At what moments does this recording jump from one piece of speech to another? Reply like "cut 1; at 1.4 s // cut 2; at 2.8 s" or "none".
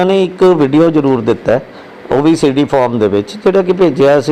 none